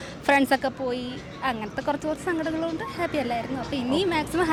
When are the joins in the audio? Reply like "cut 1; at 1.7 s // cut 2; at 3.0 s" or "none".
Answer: none